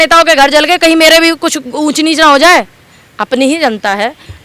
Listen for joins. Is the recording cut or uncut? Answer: uncut